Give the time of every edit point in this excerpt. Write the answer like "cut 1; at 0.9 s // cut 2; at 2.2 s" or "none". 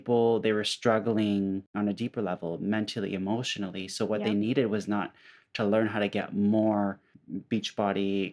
cut 1; at 1.7 s

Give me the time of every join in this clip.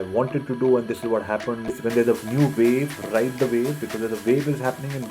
cut 1; at 1.8 s

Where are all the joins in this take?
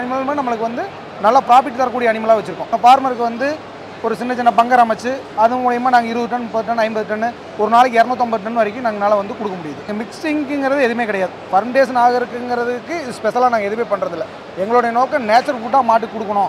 cut 1; at 2.8 s // cut 2; at 9.9 s

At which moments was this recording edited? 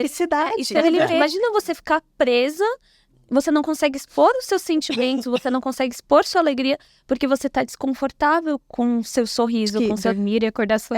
cut 1; at 1.1 s // cut 2; at 9.8 s

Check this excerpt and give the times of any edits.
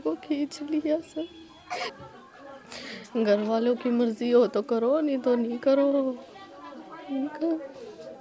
cut 1; at 1.8 s

